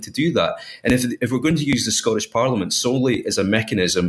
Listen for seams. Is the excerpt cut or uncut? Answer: uncut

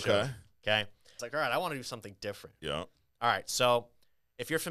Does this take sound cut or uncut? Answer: cut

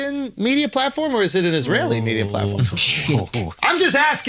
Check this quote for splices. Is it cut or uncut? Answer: uncut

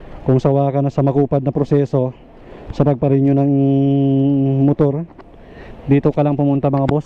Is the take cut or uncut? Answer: uncut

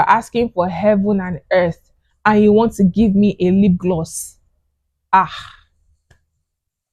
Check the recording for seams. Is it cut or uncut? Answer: uncut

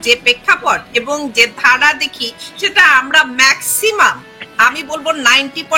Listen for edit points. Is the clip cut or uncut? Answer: uncut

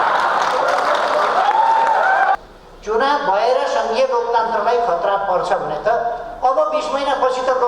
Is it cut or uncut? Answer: cut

